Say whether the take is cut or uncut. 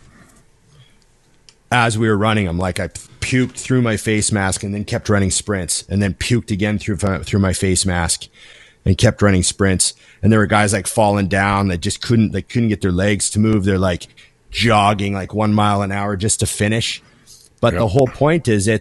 uncut